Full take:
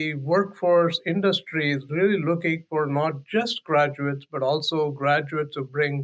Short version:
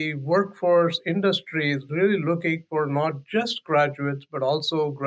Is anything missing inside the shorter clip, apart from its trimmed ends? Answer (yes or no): no